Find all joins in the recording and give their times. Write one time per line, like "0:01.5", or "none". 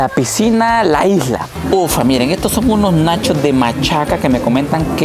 0:01.5